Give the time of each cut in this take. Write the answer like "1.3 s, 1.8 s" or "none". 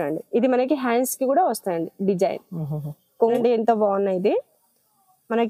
3.4 s